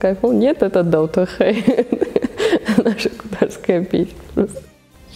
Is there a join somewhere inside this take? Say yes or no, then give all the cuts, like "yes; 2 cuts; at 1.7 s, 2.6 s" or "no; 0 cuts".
no; 0 cuts